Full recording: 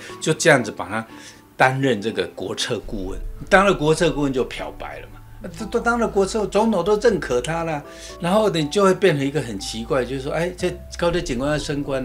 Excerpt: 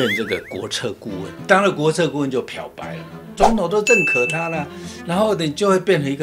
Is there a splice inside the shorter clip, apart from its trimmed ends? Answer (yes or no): yes